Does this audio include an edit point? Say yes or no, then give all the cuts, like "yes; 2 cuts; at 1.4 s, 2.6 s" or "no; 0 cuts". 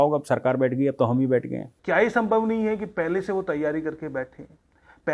yes; 1 cut; at 1.7 s